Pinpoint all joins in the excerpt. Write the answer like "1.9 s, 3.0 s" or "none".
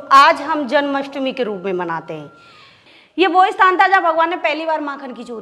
2.8 s